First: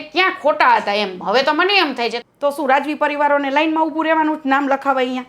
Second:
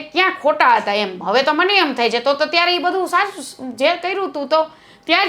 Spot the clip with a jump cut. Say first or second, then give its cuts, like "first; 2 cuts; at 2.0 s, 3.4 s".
first; 1 cut; at 2.2 s